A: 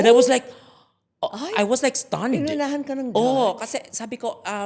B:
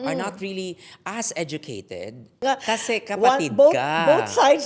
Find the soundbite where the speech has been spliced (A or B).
B